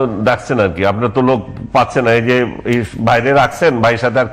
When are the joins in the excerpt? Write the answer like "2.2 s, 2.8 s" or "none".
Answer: none

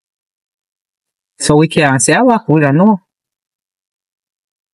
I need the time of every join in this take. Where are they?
none

